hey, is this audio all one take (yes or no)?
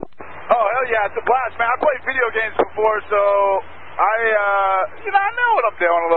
yes